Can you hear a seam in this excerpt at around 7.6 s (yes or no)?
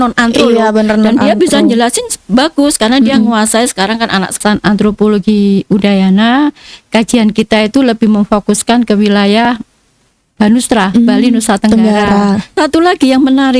no